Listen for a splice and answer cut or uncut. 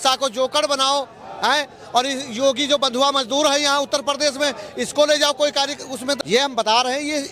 cut